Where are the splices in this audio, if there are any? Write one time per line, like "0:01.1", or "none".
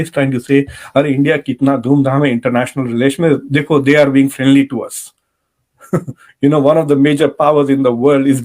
none